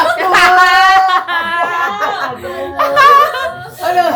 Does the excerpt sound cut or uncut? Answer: uncut